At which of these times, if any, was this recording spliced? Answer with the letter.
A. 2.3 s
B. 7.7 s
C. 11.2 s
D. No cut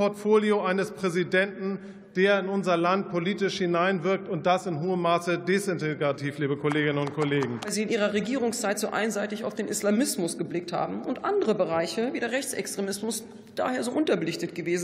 B